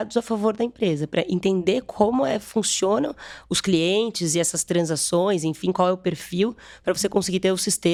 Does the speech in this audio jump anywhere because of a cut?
no; 0 cuts

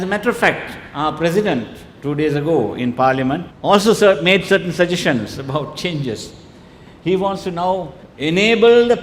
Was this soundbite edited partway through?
no; 0 cuts

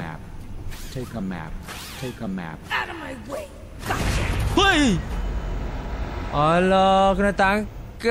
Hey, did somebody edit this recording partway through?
no; 0 cuts

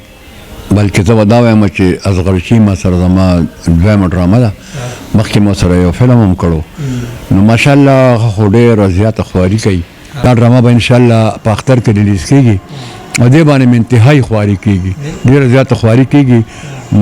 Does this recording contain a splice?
yes; 1 cut; at 10.2 s

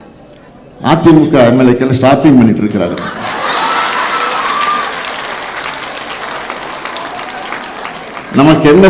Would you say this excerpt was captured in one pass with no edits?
yes; 0 cuts

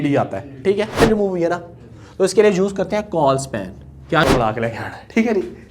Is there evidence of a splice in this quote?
yes; 2 cuts; at 1.0 s, 4.2 s

